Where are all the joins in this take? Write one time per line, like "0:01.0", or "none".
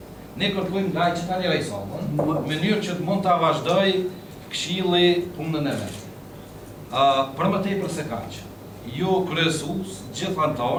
none